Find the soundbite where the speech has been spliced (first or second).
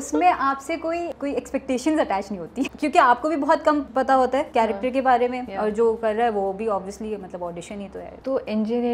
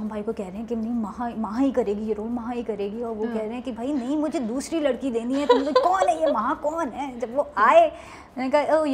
first